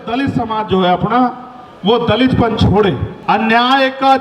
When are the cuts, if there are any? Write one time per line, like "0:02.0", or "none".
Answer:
0:03.1